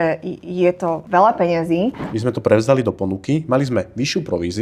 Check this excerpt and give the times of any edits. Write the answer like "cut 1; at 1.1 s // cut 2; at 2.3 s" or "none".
cut 1; at 1.0 s // cut 2; at 2.1 s